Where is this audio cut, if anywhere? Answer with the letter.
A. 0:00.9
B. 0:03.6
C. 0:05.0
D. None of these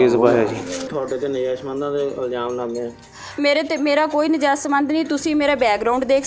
A